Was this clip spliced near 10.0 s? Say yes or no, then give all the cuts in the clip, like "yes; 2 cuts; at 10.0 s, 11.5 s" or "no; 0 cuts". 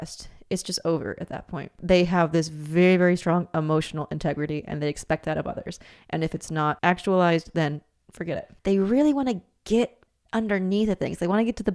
no; 3 cuts; at 1.7 s, 6.8 s, 8.5 s